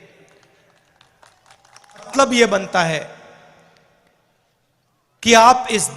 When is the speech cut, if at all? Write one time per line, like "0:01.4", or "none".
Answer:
0:02.1